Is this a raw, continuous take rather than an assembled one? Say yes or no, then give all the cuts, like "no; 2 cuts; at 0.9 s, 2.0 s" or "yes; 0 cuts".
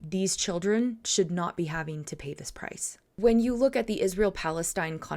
no; 1 cut; at 3.1 s